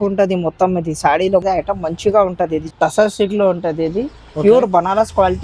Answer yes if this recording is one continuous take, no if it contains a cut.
no